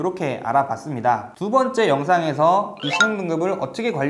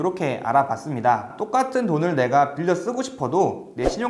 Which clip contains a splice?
second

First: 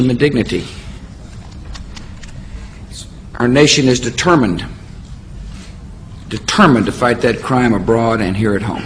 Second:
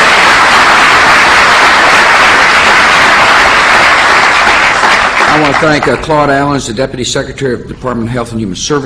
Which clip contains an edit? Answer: second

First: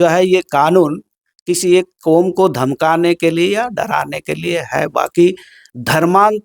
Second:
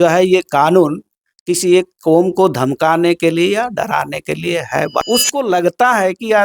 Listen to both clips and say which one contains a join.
second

